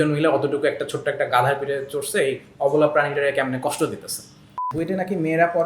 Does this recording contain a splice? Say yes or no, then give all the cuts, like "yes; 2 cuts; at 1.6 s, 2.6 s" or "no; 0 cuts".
yes; 1 cut; at 4.7 s